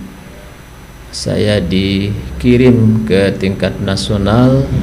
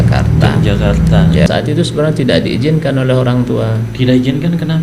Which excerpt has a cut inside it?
second; 1 cut; at 1.5 s

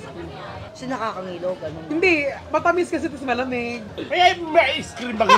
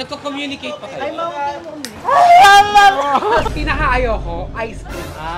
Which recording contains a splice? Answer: second; 1 cut; at 3.5 s

